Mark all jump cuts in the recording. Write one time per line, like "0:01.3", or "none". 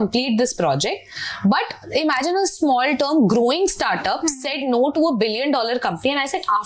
none